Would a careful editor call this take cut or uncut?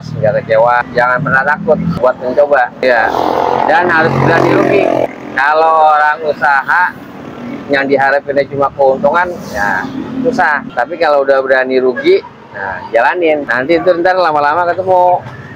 cut